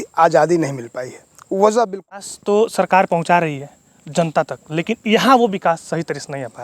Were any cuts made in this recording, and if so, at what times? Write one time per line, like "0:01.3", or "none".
0:02.3